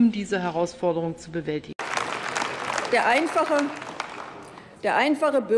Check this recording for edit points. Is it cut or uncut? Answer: cut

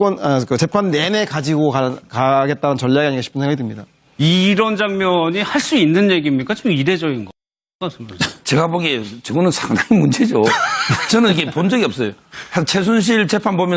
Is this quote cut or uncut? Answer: uncut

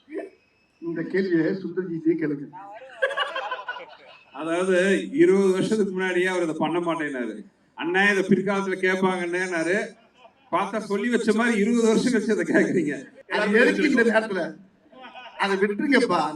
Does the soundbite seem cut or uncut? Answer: cut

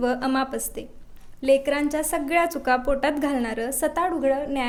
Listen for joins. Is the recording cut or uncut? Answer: uncut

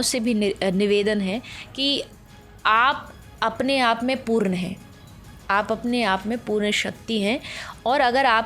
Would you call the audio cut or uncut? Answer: uncut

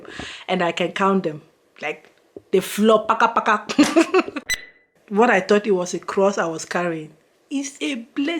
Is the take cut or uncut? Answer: cut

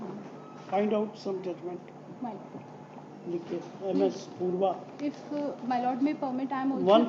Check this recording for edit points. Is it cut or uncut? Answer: uncut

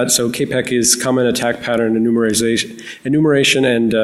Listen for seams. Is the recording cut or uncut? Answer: cut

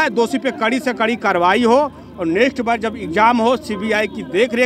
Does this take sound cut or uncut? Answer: uncut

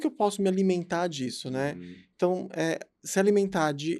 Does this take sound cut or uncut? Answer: uncut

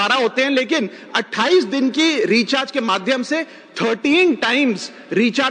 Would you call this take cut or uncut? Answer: uncut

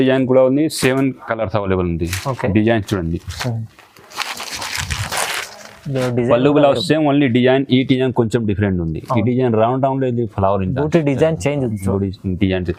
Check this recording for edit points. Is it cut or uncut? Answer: uncut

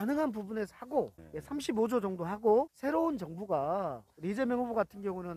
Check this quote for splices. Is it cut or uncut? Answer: cut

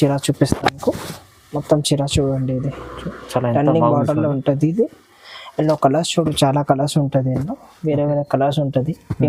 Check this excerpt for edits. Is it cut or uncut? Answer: uncut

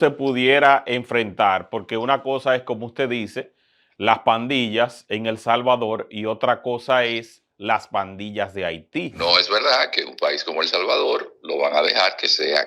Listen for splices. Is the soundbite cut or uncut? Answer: cut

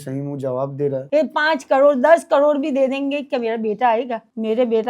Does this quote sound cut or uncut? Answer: cut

